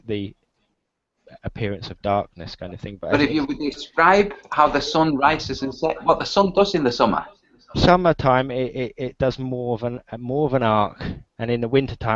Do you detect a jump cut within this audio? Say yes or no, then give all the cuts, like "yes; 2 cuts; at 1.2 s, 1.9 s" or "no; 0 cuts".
no; 0 cuts